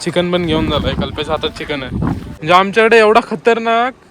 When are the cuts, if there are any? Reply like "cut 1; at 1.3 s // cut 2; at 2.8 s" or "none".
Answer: cut 1; at 2.3 s